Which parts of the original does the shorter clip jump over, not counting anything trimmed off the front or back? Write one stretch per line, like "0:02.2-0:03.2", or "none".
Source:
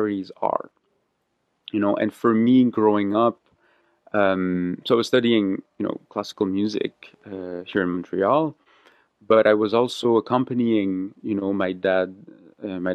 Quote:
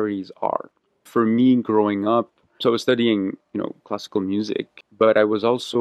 0:01.1-0:02.2
0:03.6-0:04.8
0:07.0-0:09.1

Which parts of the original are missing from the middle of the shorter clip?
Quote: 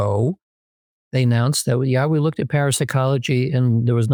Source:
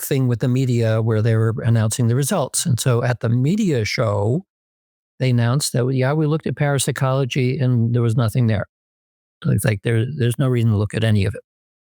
none

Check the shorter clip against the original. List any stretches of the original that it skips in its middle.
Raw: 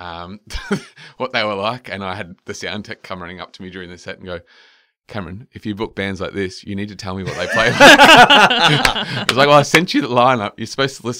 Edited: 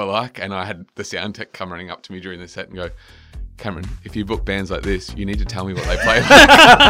none

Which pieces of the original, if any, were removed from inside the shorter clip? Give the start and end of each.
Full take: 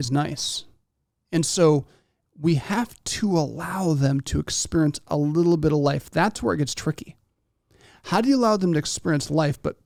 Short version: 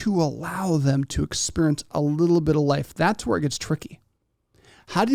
none

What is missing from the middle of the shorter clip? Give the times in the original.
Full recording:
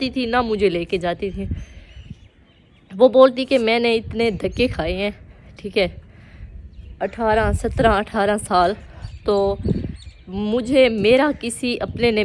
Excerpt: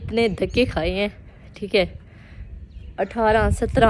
none

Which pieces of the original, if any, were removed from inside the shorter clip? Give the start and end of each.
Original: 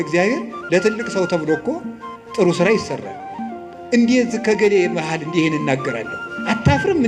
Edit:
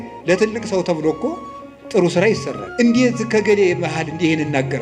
0:03.0-0:03.7

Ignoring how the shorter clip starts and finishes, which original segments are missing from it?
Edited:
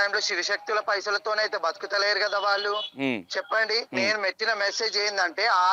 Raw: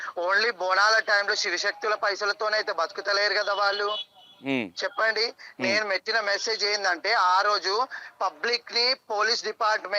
0:04.0-0:04.4
0:05.3-0:05.5

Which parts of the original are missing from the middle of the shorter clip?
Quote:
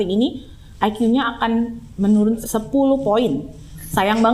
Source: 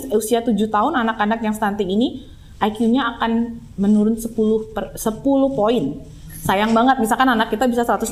0:04.2-0:05.0

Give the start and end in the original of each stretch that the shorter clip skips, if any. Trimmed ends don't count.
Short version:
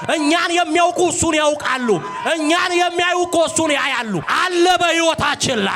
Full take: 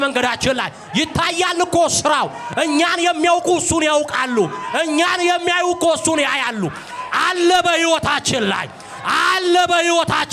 0:06.8-0:07.1

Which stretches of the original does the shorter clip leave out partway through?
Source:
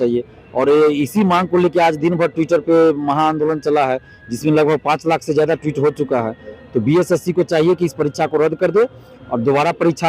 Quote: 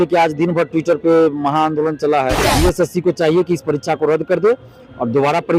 0:04.1-0:06.8

